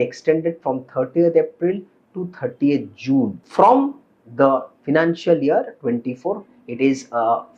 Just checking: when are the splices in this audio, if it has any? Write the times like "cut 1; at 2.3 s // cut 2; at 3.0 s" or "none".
cut 1; at 3.4 s // cut 2; at 6.5 s

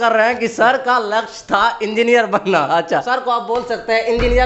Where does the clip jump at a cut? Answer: cut 1; at 3.1 s

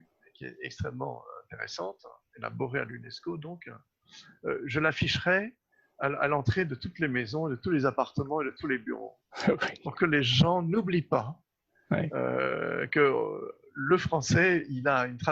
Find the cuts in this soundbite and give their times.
none

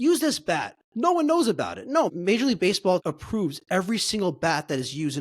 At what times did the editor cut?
cut 1; at 2.1 s // cut 2; at 3.0 s

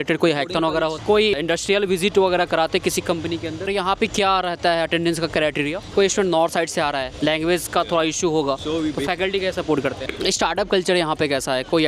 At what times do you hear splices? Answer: cut 1; at 1.0 s // cut 2; at 3.7 s // cut 3; at 5.9 s // cut 4; at 7.1 s // cut 5; at 10.0 s

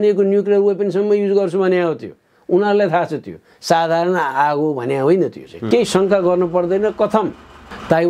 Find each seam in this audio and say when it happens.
cut 1; at 5.5 s

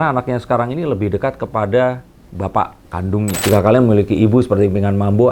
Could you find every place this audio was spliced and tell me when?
cut 1; at 3.4 s

